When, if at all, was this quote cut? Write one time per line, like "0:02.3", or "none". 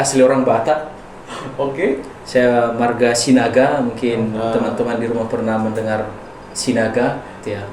none